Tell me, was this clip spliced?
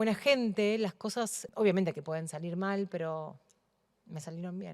yes; 1 cut; at 1.4 s

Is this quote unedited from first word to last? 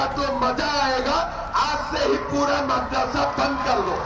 yes; 0 cuts

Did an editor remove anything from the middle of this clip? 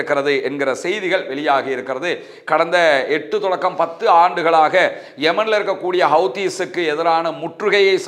no; 0 cuts

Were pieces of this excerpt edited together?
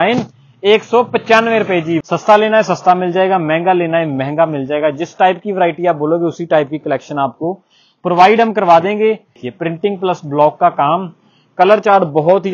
yes; 2 cuts; at 2.0 s, 9.3 s

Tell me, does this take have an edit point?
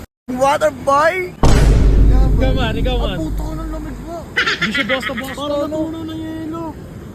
no; 0 cuts

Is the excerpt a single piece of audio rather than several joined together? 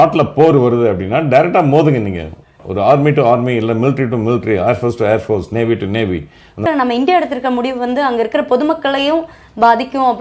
no; 1 cut; at 6.6 s

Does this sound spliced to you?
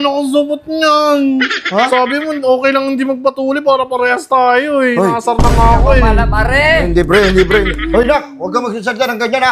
no; 0 cuts

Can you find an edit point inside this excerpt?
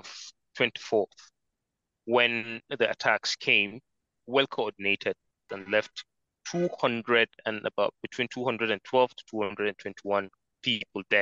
yes; 2 cuts; at 4.2 s, 5.5 s

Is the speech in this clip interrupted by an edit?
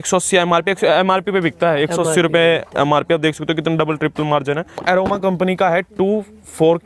yes; 1 cut; at 4.7 s

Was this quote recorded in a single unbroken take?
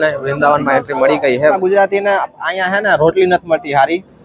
no; 1 cut; at 1.6 s

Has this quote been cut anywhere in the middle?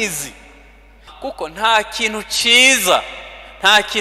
yes; 1 cut; at 1.0 s

